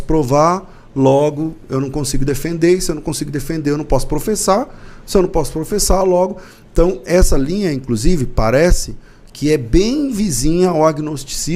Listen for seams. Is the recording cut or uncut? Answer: uncut